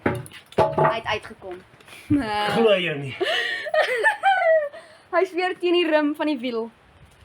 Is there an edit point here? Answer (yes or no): no